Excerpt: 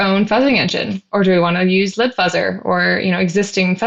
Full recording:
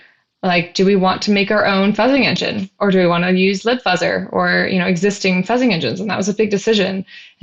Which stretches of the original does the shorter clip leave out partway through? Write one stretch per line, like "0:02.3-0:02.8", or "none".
none